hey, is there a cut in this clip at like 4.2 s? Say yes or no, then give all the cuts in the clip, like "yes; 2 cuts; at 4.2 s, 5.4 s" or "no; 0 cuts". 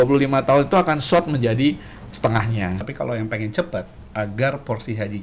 no; 1 cut; at 2.8 s